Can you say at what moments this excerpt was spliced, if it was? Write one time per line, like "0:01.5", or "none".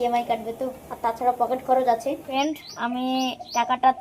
0:02.2